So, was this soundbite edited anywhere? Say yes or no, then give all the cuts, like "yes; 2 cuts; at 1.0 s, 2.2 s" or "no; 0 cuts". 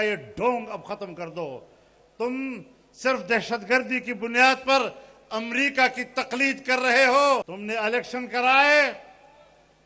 yes; 1 cut; at 7.6 s